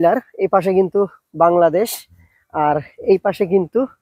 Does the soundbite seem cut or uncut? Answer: uncut